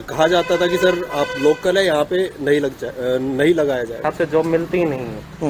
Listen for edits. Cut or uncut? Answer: cut